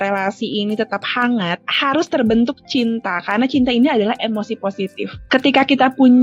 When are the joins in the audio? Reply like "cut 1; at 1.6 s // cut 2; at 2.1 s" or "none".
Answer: cut 1; at 1.6 s